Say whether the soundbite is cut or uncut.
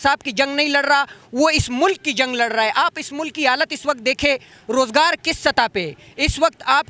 uncut